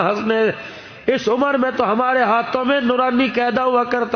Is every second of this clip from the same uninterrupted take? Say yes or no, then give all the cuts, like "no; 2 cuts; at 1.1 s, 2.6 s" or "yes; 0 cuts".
yes; 0 cuts